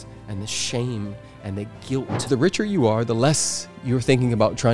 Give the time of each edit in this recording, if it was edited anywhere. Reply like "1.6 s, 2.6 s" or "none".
2.1 s